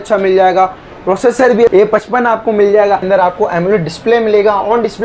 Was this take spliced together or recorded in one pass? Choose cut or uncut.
cut